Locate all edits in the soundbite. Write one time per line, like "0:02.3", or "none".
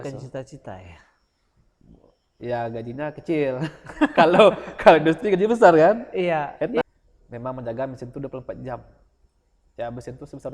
0:06.8